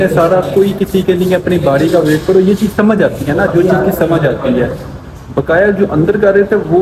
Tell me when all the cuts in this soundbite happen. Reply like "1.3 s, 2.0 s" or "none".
none